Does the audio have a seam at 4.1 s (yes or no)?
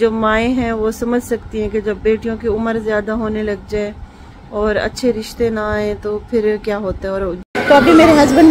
no